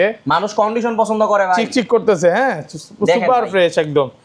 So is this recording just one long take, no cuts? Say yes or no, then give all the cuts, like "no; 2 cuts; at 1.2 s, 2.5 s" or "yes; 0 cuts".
yes; 0 cuts